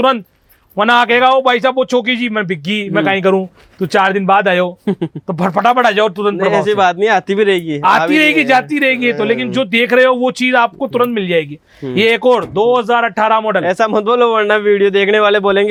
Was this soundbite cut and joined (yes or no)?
no